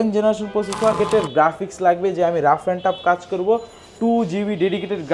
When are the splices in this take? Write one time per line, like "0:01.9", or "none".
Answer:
0:01.0